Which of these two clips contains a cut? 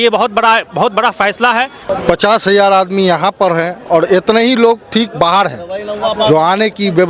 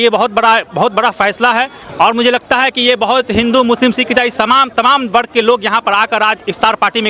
first; 1 cut; at 1.8 s

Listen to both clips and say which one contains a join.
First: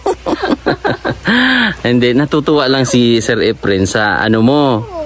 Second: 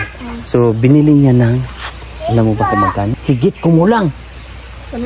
second; 1 cut; at 3.1 s

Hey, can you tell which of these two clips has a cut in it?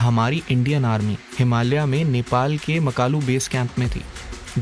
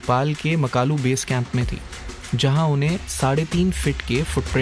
first; 1 cut; at 1.2 s

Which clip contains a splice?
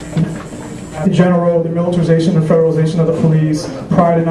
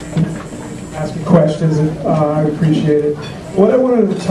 second; 1 cut; at 1.0 s

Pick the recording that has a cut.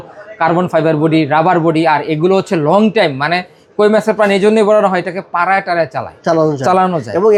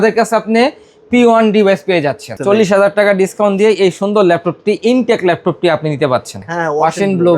second; 2 cuts; at 2.3 s, 6.3 s

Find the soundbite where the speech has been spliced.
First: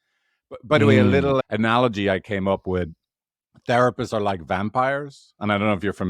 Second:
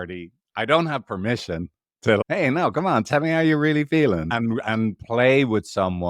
second; 1 cut; at 4.3 s

